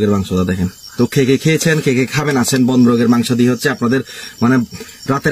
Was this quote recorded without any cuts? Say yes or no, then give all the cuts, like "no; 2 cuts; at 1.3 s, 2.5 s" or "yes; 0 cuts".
yes; 0 cuts